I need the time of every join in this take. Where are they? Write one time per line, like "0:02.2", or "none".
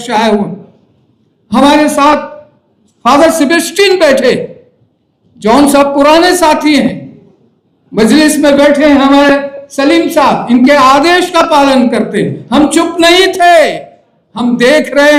none